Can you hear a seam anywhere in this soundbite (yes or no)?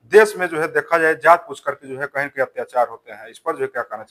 no